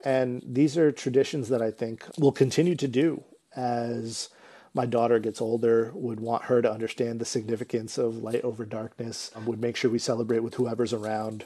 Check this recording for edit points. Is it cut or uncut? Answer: uncut